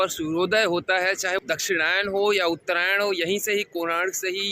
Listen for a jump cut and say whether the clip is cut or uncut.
cut